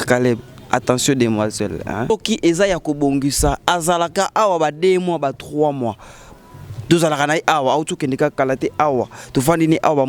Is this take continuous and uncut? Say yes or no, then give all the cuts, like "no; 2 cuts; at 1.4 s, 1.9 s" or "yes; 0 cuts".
no; 1 cut; at 2.1 s